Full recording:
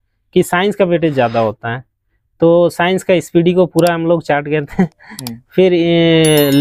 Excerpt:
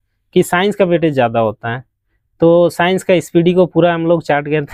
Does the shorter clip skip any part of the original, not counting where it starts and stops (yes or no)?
no